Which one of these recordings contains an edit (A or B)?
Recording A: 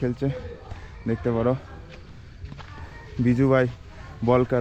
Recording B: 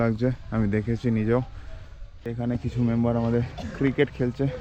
B